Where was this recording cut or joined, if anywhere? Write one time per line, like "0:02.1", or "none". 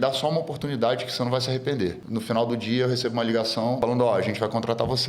0:02.0
0:03.8